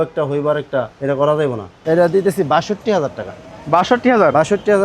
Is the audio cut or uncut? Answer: cut